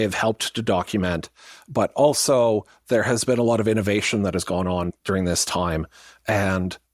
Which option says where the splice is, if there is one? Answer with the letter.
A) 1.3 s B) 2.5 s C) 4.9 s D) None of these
C